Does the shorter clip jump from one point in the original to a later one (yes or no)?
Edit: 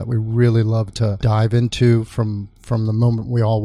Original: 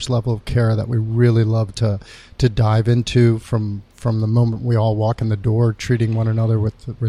yes